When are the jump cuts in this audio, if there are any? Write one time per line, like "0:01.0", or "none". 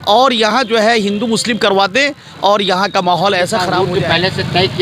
0:03.7